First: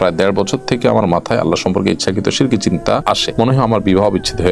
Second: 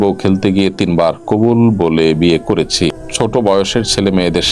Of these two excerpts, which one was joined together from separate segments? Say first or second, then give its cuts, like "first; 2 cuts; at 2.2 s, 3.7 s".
first; 1 cut; at 3.2 s